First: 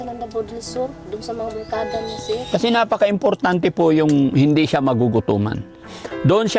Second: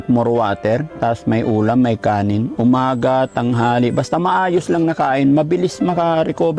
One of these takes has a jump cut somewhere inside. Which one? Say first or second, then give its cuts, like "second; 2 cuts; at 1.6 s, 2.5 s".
first; 1 cut; at 2.4 s